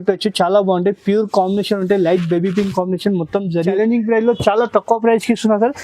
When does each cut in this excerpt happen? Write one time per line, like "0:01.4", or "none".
0:03.7